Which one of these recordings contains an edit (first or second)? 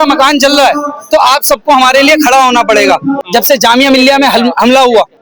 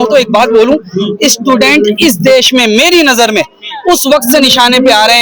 first